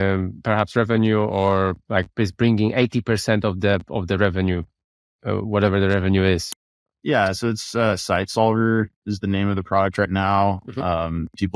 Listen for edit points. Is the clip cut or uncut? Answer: uncut